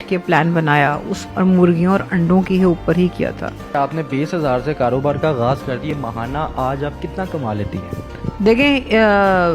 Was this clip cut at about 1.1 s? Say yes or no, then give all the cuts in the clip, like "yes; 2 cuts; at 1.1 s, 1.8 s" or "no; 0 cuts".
yes; 3 cuts; at 1.1 s, 3.7 s, 5.9 s